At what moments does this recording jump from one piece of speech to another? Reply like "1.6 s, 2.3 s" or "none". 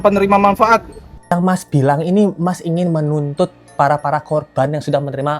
1.2 s